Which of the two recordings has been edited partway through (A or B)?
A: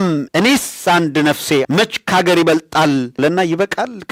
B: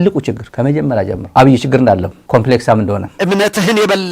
B